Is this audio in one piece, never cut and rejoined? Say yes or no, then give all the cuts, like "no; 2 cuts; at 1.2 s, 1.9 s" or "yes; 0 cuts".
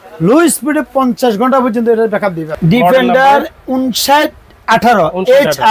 no; 1 cut; at 2.5 s